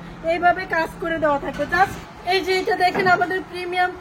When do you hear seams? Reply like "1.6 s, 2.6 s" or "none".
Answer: 2.0 s